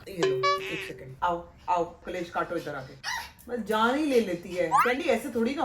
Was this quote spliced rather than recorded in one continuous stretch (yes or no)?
no